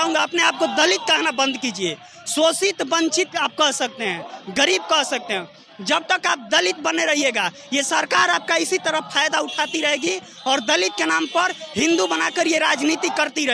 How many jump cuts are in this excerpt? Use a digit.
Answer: 0